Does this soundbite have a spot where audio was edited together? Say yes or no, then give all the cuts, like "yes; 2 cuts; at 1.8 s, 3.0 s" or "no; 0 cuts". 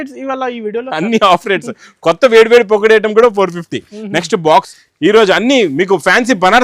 yes; 1 cut; at 4.7 s